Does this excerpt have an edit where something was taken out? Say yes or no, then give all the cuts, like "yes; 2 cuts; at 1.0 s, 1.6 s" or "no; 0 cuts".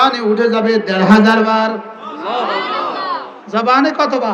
no; 0 cuts